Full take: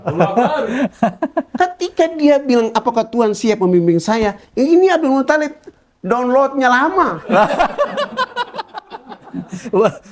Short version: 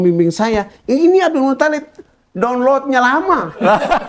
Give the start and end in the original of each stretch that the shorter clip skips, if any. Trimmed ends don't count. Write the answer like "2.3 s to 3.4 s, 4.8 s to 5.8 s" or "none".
none

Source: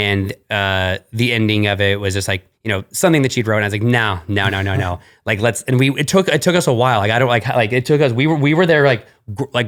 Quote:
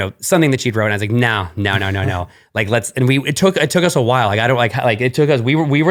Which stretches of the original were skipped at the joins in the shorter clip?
none

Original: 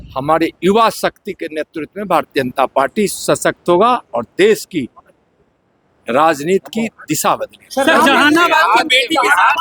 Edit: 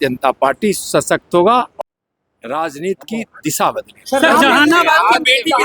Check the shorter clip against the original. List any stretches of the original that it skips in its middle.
4.1 s to 5.4 s

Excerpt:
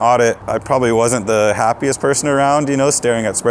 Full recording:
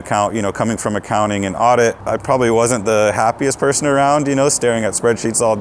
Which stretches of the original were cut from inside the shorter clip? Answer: none

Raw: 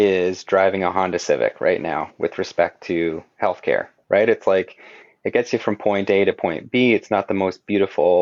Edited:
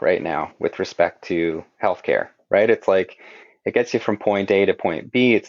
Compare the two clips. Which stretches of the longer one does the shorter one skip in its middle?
none

